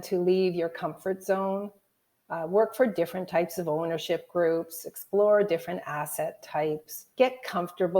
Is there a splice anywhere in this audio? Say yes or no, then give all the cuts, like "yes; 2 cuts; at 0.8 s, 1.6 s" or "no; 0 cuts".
yes; 1 cut; at 7.1 s